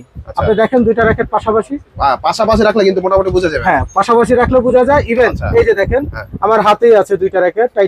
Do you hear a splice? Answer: no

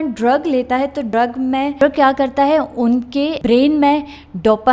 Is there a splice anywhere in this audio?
yes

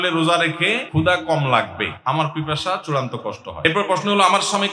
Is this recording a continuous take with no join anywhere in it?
no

